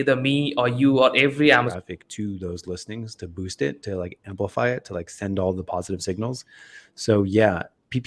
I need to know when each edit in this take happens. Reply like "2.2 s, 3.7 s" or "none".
1.7 s